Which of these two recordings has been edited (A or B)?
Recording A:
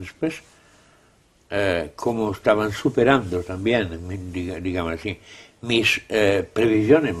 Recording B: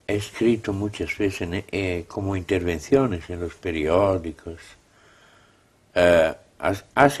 A